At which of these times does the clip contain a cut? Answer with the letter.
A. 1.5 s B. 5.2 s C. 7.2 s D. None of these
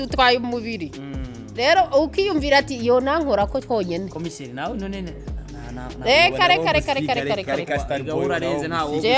D